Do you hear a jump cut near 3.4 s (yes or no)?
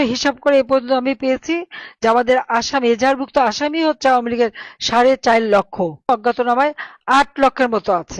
no